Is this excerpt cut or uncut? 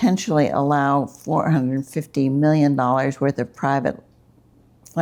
uncut